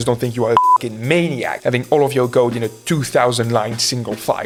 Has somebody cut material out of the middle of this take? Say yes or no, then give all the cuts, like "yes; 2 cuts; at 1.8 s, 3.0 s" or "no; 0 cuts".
no; 0 cuts